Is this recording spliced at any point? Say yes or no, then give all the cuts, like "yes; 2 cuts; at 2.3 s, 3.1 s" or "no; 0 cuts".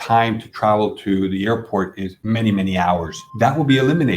yes; 2 cuts; at 2.1 s, 3.2 s